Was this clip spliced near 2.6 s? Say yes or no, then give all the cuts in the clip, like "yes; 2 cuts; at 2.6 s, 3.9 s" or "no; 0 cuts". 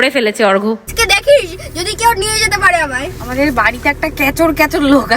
no; 1 cut; at 0.9 s